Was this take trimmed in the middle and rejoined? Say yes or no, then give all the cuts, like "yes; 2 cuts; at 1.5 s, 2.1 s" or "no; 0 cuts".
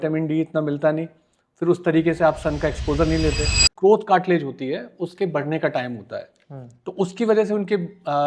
yes; 1 cut; at 3.6 s